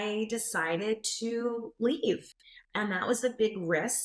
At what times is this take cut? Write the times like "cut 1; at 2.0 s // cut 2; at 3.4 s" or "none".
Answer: none